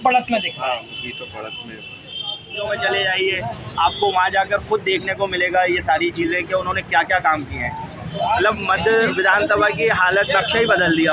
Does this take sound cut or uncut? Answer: cut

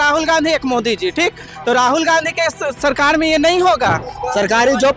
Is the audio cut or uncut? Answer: cut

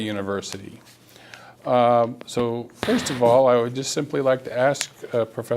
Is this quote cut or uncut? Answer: cut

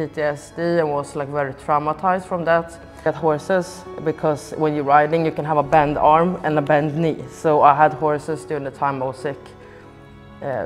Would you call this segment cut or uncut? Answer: uncut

